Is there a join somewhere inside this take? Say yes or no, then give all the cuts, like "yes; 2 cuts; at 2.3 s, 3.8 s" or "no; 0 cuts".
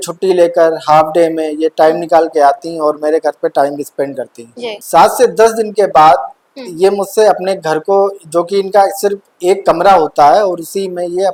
no; 0 cuts